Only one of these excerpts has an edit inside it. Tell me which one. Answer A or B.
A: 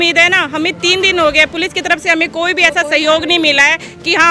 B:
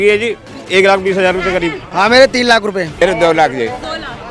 B